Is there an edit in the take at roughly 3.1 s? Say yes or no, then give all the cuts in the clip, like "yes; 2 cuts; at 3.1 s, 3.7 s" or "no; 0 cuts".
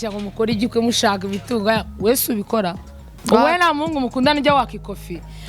yes; 1 cut; at 3.1 s